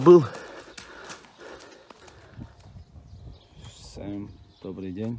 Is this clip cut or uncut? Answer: cut